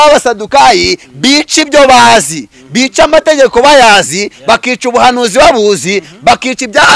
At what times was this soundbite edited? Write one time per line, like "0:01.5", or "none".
none